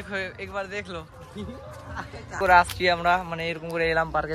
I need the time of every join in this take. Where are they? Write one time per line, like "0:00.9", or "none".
0:02.4